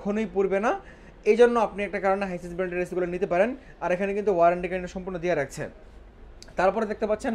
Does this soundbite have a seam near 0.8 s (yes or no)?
no